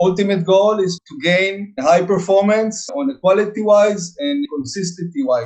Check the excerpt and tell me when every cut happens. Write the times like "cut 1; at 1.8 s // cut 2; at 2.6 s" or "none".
cut 1; at 2.8 s // cut 2; at 4.4 s